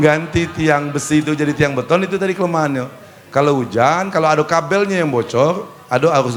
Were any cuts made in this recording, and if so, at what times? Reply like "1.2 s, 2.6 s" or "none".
none